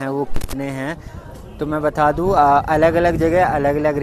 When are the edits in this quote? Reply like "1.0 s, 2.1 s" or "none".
none

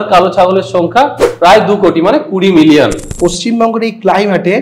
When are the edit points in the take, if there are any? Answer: 3.1 s

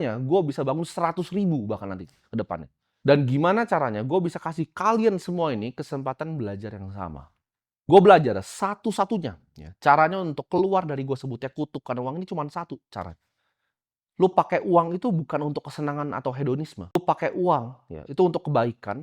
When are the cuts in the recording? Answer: 17.0 s

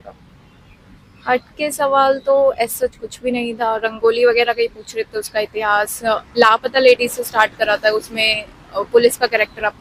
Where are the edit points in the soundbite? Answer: none

